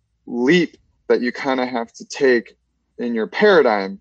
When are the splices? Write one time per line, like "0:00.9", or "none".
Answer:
0:02.8